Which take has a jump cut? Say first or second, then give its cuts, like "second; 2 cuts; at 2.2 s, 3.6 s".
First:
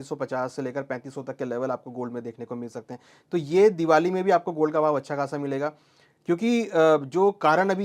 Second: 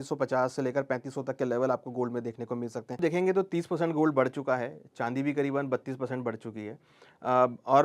second; 1 cut; at 3.0 s